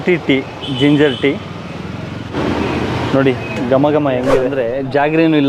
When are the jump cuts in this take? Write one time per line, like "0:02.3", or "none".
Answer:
0:04.6